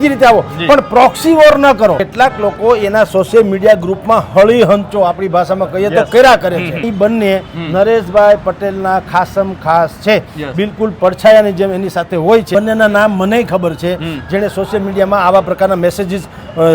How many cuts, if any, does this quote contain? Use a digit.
3